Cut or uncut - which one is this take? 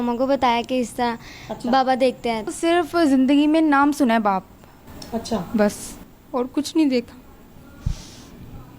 cut